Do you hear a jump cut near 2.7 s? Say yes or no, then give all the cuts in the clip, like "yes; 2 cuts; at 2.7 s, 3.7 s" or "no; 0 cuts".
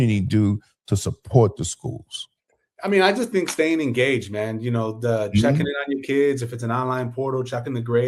no; 0 cuts